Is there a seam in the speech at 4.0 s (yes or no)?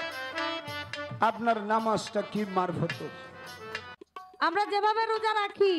yes